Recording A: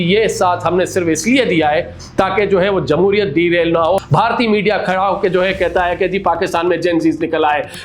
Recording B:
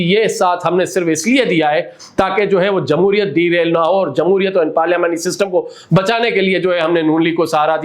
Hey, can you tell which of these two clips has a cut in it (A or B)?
A